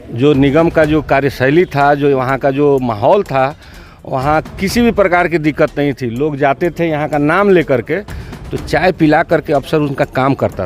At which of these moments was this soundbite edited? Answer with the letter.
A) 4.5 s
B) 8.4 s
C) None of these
C